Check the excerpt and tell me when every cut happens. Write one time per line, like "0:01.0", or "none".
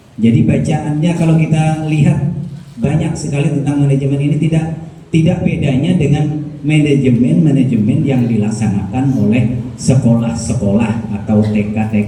none